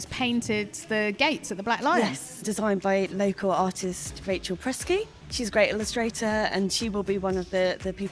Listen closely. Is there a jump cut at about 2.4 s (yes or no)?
yes